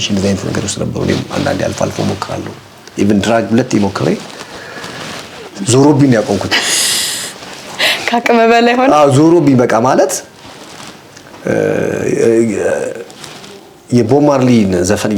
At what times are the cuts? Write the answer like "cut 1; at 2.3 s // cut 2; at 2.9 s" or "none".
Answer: none